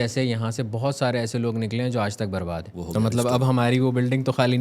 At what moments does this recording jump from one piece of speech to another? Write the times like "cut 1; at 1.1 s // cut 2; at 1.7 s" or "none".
cut 1; at 2.7 s

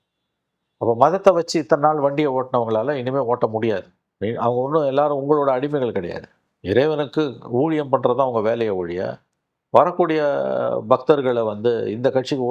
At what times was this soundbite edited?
cut 1; at 4.0 s

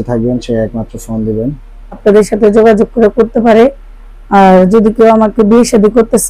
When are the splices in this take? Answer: cut 1; at 2.0 s

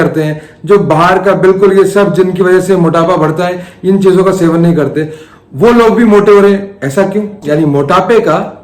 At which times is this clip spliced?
cut 1; at 7.4 s

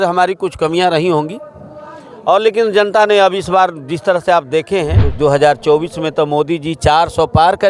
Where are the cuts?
cut 1; at 5.0 s

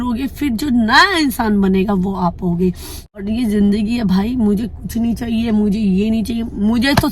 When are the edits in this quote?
cut 1; at 3.0 s

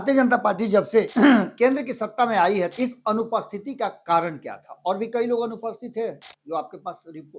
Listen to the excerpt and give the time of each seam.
cut 1; at 1.1 s // cut 2; at 2.7 s

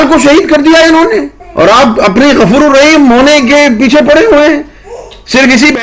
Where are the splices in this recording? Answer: cut 1; at 1.4 s

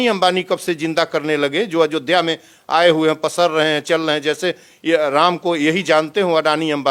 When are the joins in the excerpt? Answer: none

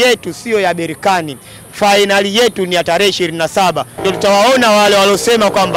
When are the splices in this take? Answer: cut 1; at 3.9 s

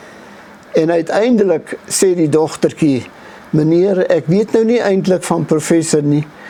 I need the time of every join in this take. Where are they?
none

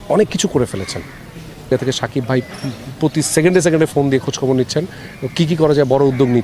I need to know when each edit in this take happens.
cut 1; at 1.7 s

